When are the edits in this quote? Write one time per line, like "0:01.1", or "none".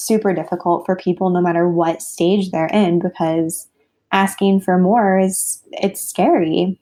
none

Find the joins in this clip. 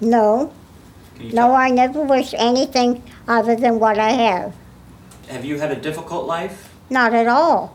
0:05.2

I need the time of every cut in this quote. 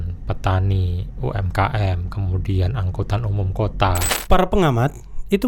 0:04.1

